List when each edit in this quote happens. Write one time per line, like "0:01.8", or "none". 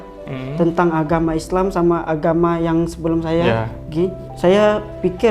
0:04.2